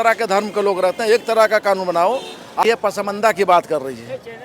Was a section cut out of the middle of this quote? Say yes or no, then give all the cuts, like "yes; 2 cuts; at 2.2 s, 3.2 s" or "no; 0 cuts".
yes; 1 cut; at 2.6 s